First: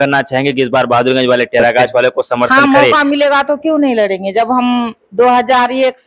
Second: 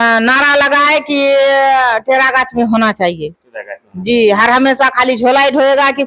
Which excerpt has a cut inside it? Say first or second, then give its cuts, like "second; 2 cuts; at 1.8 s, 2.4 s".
first; 1 cut; at 2.5 s